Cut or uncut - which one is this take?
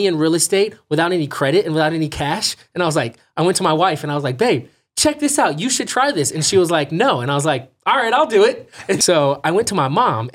cut